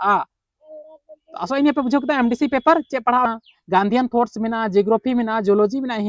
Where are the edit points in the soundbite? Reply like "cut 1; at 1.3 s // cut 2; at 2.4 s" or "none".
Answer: cut 1; at 3.2 s